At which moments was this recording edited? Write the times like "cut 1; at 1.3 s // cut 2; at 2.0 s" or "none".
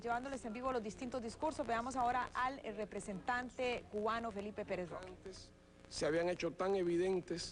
cut 1; at 1.7 s